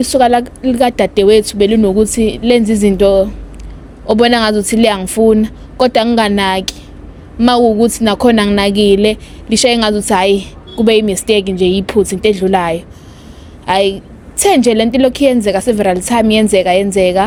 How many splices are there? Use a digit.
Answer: 0